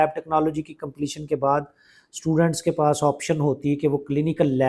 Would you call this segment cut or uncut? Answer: uncut